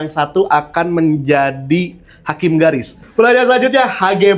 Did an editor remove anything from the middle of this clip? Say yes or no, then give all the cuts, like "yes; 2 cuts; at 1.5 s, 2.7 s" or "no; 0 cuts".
yes; 1 cut; at 3.0 s